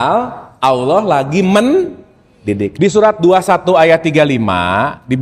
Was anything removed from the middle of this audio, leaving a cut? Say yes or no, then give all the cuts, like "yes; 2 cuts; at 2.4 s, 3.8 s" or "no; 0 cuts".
yes; 1 cut; at 2.7 s